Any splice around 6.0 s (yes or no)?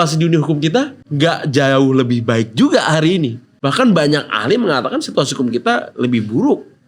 no